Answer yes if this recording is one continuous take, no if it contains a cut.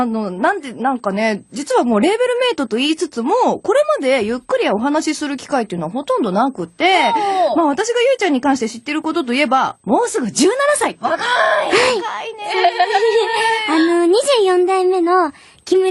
no